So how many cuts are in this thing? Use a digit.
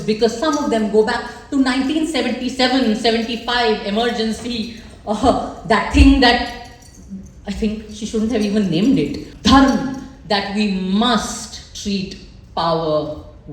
1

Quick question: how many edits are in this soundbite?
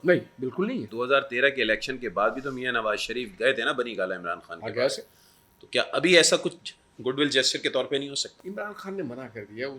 2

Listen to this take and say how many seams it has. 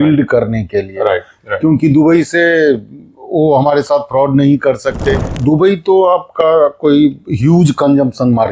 2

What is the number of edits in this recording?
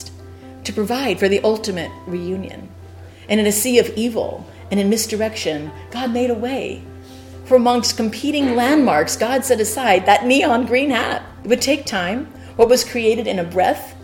2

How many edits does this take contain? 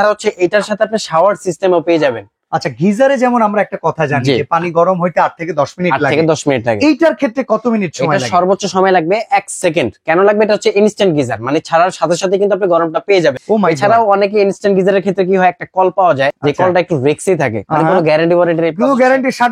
0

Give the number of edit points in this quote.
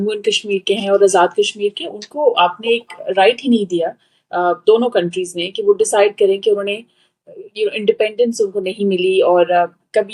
0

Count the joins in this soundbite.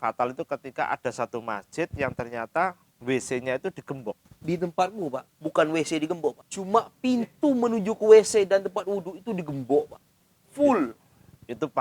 3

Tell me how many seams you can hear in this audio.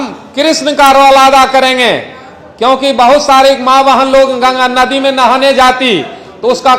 0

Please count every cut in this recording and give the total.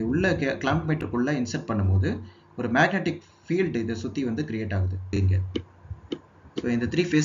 1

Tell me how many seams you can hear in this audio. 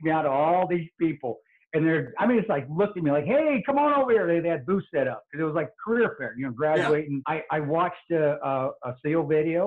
1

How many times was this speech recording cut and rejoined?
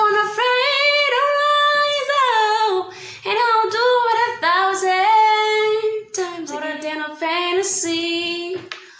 1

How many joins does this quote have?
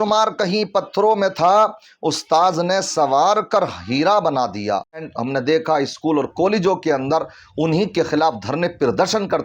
1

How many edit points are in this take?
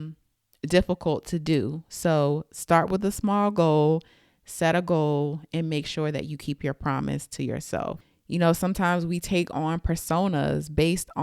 1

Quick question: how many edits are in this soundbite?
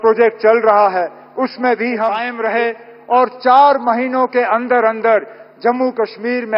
1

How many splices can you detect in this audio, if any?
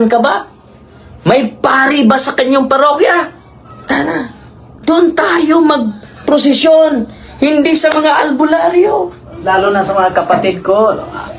1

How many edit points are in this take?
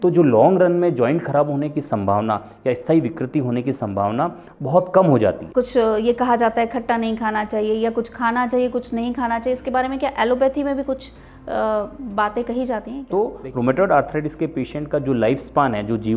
2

